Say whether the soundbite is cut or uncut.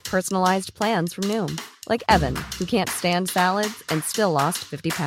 uncut